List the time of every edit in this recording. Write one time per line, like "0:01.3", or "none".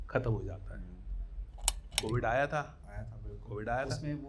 0:01.8